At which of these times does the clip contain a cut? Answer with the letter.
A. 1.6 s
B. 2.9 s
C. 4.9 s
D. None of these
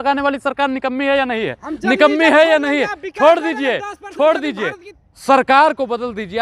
C